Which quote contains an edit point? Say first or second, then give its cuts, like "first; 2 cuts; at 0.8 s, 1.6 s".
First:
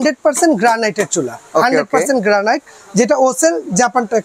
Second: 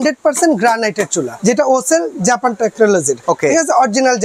second; 2 cuts; at 1.3 s, 3.2 s